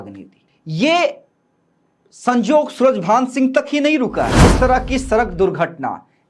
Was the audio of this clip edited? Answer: yes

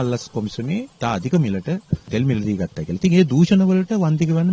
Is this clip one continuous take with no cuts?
no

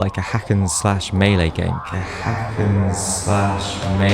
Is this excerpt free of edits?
no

